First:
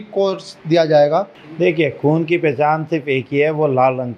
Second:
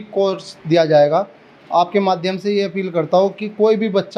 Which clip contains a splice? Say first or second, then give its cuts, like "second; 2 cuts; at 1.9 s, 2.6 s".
first; 1 cut; at 1.4 s